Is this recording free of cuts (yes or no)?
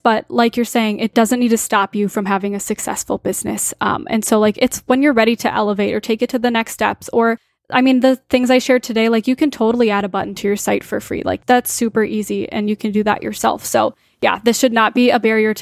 no